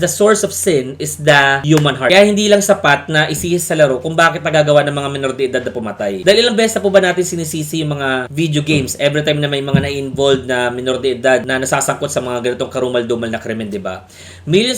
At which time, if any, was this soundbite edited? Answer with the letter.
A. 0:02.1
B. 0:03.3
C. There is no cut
A